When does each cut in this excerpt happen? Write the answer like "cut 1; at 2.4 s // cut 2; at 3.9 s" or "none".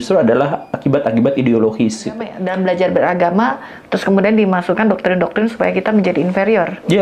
cut 1; at 2.4 s